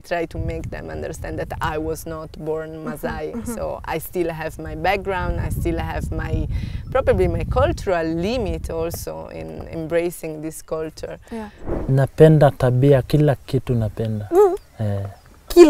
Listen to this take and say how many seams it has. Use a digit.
1